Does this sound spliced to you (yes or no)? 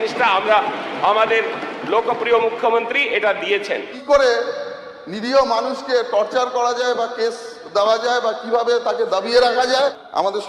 yes